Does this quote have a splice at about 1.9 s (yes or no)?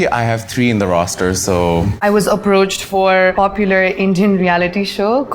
yes